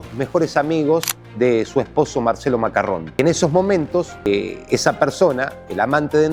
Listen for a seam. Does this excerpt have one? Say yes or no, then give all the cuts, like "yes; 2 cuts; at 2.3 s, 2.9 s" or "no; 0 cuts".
no; 0 cuts